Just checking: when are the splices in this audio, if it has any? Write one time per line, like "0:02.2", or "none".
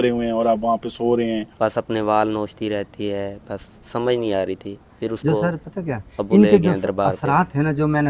0:01.5